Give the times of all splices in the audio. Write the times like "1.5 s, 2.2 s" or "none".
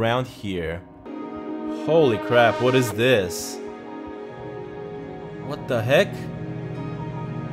1.1 s